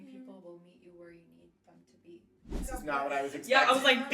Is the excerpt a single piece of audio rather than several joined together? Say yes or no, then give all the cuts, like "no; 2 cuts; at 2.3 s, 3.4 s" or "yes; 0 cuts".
no; 1 cut; at 2.6 s